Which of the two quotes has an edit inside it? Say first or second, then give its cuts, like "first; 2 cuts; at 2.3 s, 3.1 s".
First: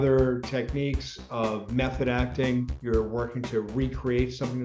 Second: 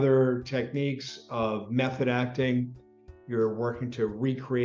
first; 1 cut; at 2.8 s